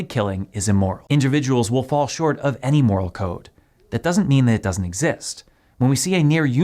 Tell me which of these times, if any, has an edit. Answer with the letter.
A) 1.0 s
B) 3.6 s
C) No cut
A